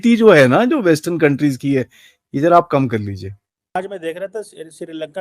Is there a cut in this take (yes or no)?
yes